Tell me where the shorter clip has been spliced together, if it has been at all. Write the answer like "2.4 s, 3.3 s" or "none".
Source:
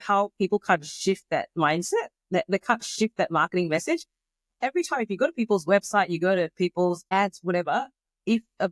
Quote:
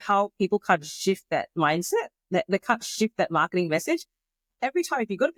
none

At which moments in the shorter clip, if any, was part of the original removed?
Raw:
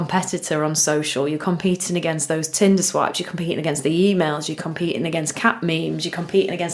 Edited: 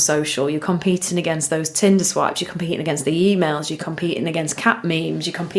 none

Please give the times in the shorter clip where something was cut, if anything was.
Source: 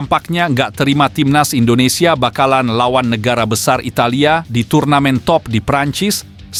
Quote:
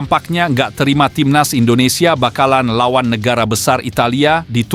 none

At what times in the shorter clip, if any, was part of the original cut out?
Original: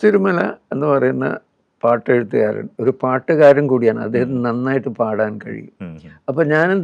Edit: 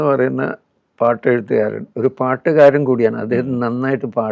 none

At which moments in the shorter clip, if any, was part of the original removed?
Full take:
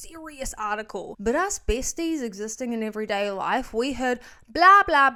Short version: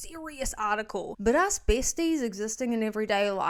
none

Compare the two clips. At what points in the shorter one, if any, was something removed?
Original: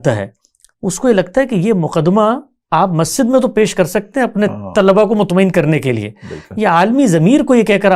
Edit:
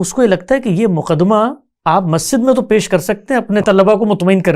3.6 s

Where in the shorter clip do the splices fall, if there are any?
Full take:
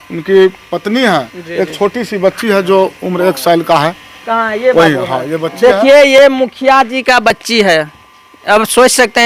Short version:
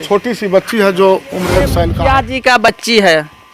1.8 s

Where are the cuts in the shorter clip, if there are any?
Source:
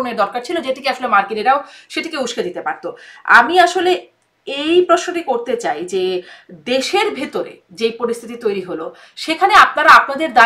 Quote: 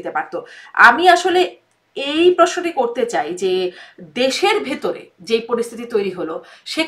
none

